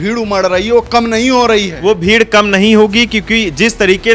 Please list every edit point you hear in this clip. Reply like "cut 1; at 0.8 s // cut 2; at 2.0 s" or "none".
none